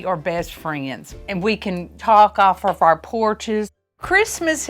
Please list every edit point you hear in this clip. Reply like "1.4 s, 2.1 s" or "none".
1.1 s, 3.8 s